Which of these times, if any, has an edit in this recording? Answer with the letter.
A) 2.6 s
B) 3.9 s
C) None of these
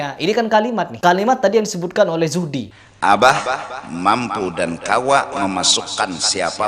A